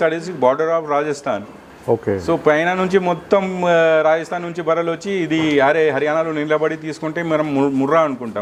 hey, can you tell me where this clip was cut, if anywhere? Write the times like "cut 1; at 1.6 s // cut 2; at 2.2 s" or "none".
none